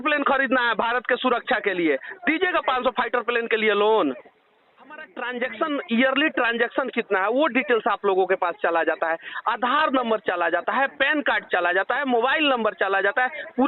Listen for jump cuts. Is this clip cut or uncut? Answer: cut